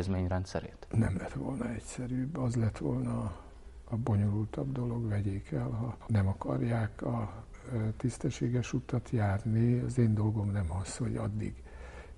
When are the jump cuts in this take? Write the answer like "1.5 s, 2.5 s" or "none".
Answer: none